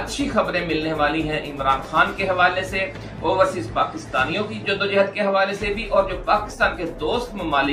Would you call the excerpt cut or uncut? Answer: uncut